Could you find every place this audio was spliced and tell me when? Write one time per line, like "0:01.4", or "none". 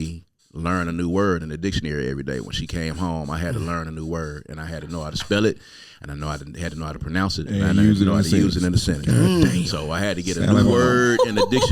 none